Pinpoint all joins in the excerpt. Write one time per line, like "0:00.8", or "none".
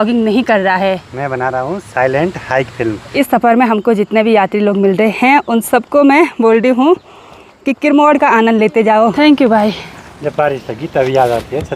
0:03.1
0:09.1